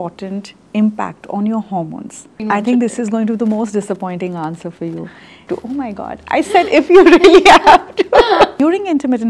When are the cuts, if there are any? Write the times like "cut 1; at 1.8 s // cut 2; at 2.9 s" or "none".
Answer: cut 1; at 2.3 s // cut 2; at 5.4 s // cut 3; at 8.5 s